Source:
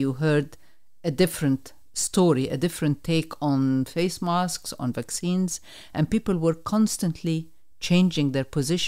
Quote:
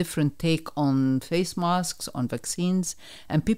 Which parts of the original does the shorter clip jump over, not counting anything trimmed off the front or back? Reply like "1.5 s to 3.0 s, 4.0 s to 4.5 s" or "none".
none